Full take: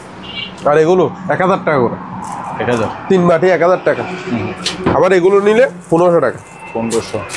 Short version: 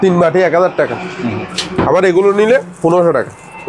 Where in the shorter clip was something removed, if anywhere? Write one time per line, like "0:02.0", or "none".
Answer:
none